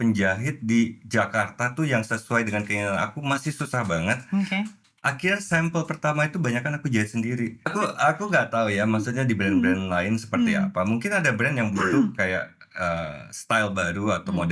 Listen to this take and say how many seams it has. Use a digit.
1